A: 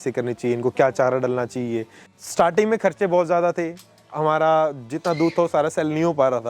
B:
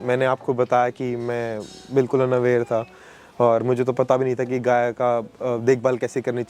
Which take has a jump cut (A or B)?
A